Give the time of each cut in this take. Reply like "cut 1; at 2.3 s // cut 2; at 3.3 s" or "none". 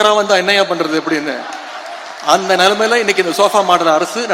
none